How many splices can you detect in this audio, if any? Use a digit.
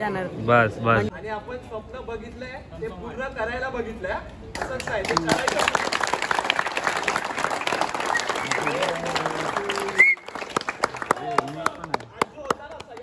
1